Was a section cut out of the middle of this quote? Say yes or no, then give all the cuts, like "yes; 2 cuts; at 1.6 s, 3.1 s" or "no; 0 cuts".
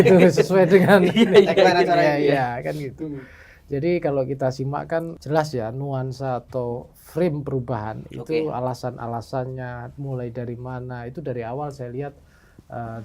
yes; 1 cut; at 5.1 s